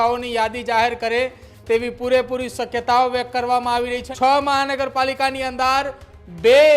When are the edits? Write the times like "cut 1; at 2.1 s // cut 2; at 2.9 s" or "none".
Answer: cut 1; at 4.0 s